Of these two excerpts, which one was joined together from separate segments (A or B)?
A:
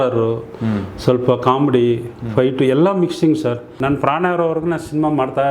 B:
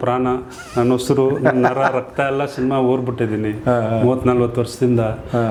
A